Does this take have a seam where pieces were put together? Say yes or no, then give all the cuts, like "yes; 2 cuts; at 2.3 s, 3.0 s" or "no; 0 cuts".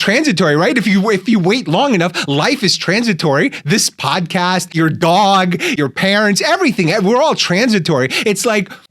yes; 2 cuts; at 4.7 s, 5.8 s